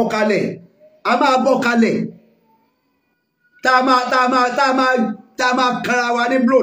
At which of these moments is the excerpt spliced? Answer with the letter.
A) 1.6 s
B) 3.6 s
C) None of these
C